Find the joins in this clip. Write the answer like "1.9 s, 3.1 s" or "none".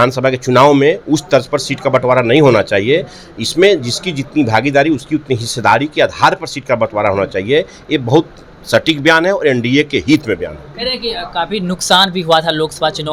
none